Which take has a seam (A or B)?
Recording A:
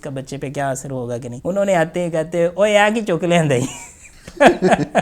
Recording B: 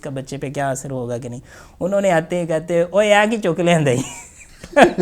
A